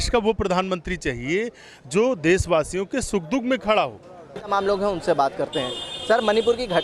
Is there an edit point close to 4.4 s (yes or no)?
yes